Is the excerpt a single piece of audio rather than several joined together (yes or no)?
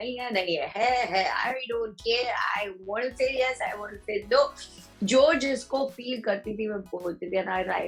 yes